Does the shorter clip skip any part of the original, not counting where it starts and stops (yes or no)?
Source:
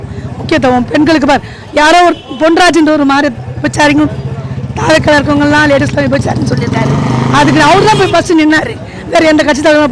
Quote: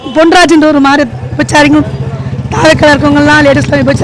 no